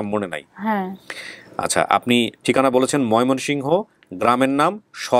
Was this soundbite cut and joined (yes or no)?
no